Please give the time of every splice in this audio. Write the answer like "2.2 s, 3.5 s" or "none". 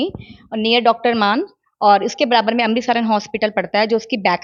none